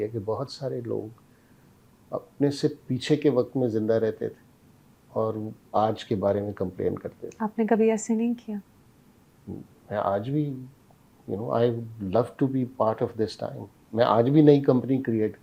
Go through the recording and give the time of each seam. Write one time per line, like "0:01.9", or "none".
none